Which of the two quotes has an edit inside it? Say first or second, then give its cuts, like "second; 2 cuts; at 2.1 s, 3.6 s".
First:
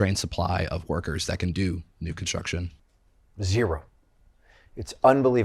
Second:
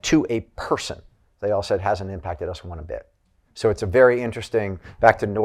first; 1 cut; at 2.8 s